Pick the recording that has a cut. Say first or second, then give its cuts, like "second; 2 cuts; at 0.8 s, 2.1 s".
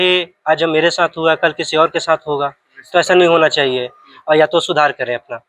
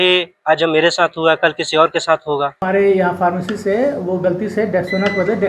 second; 1 cut; at 2.6 s